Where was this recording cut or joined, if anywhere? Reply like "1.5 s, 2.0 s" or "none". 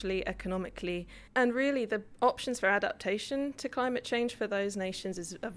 1.2 s